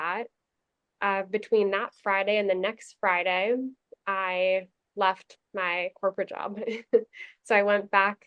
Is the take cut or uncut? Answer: uncut